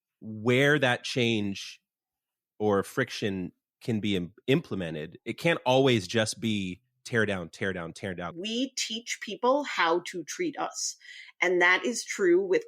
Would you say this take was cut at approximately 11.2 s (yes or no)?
no